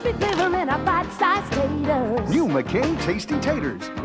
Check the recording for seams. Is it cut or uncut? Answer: uncut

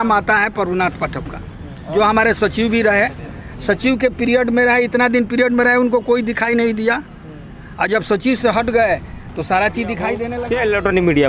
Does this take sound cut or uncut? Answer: cut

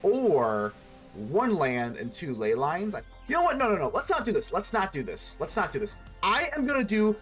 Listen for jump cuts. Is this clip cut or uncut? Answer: cut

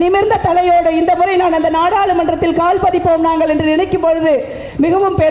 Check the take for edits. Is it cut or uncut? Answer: uncut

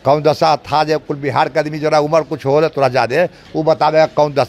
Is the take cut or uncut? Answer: uncut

